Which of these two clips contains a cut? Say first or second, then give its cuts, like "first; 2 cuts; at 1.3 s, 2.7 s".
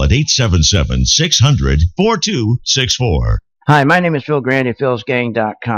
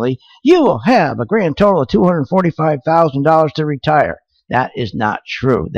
first; 1 cut; at 3.3 s